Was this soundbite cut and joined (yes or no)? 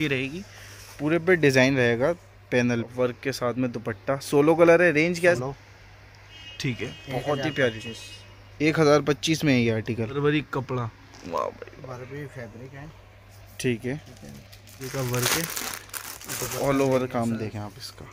yes